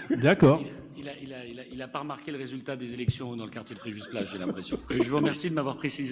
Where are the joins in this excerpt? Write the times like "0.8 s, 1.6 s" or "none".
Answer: 5.1 s